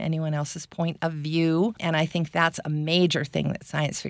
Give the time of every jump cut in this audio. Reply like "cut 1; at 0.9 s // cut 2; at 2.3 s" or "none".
cut 1; at 1.8 s